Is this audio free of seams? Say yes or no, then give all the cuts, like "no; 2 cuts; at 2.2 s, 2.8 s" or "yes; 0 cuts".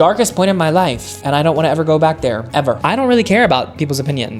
no; 1 cut; at 2.8 s